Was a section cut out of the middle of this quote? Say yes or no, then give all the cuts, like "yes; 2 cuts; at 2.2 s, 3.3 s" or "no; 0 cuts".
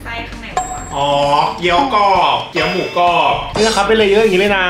yes; 1 cut; at 3.5 s